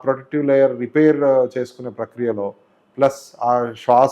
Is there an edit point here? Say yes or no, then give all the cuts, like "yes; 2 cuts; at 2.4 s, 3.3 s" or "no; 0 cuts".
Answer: no; 0 cuts